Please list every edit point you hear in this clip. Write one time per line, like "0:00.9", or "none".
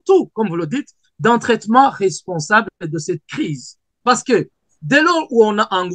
0:03.9